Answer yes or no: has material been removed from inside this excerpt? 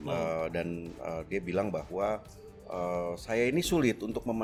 no